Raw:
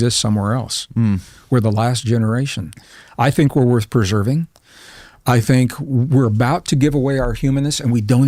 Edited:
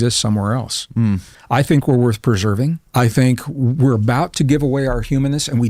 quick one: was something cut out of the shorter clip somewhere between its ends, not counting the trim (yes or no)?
yes